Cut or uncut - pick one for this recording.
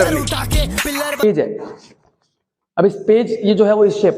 cut